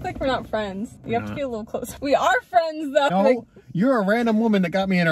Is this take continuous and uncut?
no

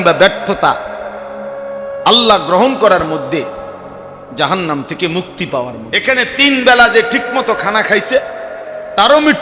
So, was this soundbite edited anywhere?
yes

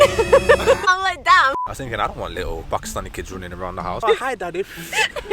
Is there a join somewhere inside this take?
yes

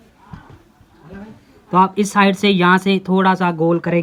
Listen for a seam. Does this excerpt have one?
no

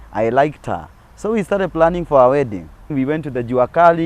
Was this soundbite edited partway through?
yes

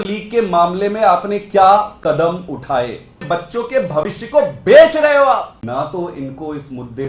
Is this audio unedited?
no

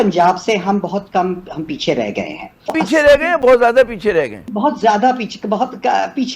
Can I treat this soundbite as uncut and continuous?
no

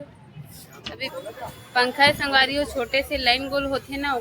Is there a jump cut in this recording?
yes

